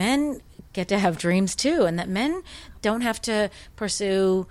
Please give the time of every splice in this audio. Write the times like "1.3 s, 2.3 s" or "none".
2.6 s